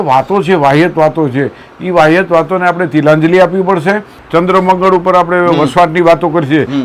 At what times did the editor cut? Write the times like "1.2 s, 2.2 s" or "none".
4.1 s